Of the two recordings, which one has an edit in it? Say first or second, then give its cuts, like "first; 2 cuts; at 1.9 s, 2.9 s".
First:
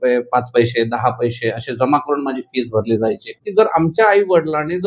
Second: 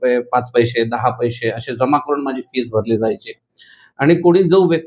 first; 1 cut; at 3.3 s